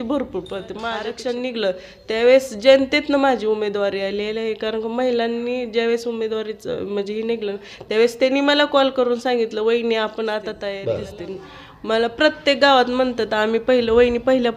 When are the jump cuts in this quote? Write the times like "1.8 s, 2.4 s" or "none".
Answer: 1.0 s, 10.7 s